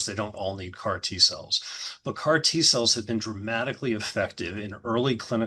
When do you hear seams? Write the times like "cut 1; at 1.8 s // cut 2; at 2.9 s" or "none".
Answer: none